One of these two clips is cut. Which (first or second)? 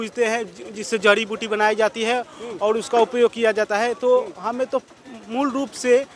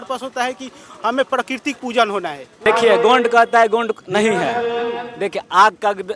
second